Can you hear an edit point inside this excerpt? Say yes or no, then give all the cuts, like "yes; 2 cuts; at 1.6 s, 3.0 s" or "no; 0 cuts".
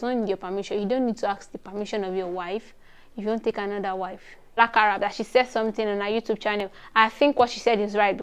yes; 1 cut; at 4.6 s